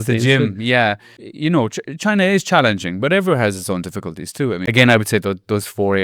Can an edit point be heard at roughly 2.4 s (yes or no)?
no